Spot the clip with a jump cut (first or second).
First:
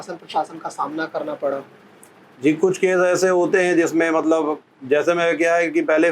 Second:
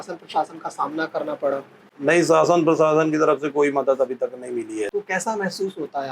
second